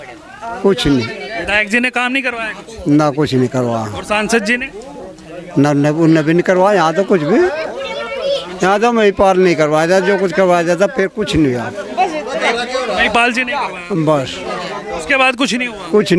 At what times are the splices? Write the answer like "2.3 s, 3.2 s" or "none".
none